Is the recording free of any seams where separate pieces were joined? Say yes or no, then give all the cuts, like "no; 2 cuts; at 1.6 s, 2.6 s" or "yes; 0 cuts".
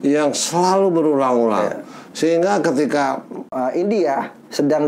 no; 1 cut; at 3.5 s